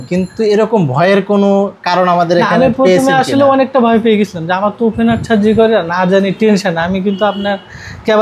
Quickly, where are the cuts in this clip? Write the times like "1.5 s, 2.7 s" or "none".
none